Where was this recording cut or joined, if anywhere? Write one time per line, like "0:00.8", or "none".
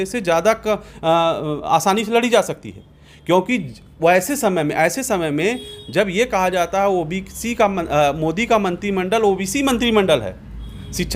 none